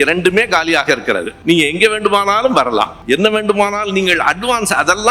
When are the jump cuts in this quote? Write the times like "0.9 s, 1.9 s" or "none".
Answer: 1.3 s, 3.0 s